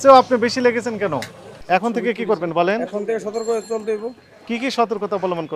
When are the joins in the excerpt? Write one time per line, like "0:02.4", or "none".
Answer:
0:01.6